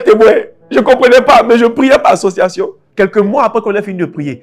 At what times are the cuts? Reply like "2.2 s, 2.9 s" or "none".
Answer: 2.8 s